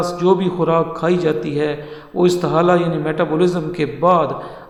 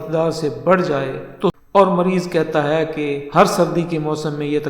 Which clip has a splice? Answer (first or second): second